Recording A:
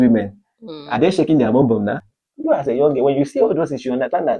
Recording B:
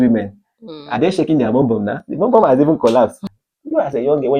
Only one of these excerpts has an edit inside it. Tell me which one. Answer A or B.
A